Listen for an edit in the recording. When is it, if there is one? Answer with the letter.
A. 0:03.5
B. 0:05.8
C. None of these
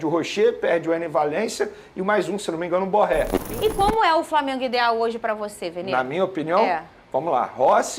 A